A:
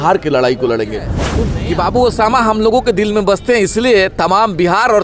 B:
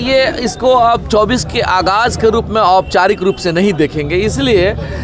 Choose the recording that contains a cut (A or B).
A